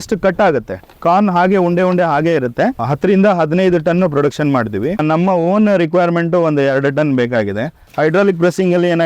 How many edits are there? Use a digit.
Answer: 3